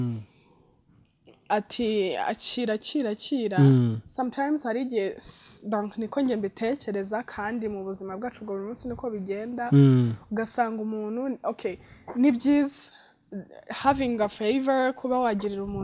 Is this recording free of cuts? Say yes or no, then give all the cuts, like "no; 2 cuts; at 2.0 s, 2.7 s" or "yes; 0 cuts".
yes; 0 cuts